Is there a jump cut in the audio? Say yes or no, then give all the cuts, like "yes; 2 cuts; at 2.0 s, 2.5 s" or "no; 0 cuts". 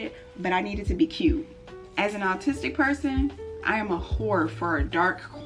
yes; 1 cut; at 1.9 s